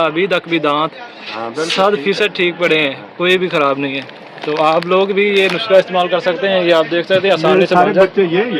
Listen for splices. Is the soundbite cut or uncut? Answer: uncut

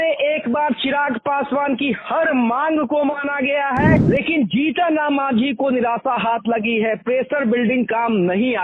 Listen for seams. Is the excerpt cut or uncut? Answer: cut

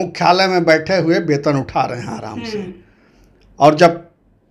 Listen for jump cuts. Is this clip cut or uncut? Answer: uncut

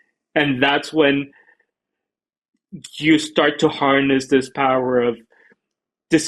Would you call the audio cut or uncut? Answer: uncut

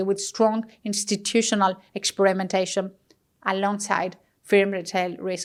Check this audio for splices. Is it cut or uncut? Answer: uncut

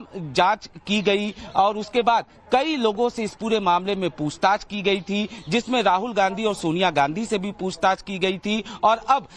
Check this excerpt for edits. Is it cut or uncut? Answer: uncut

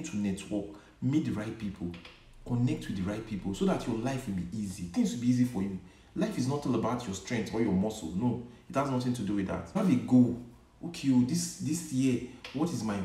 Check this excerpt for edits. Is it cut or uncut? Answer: cut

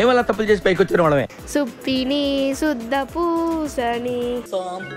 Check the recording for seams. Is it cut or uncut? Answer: cut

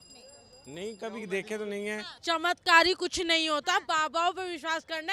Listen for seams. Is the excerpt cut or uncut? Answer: cut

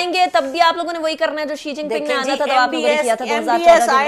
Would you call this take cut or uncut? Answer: uncut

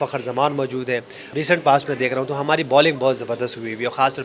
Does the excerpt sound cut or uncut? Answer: cut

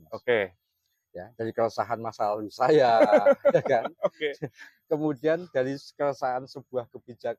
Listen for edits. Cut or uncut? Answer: uncut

